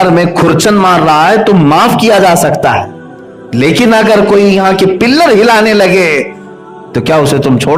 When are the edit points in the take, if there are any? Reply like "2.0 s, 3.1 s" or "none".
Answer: none